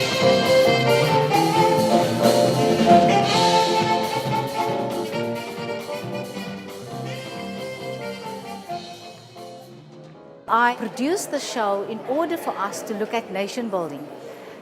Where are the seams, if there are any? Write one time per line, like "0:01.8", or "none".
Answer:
0:05.3